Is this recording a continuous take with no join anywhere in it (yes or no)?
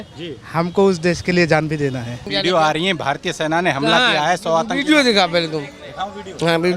no